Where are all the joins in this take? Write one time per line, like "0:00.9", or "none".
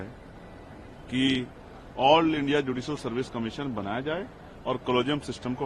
none